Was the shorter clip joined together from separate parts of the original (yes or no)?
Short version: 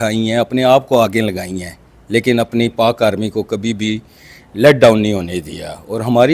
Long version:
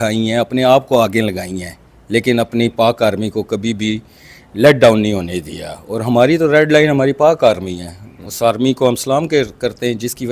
no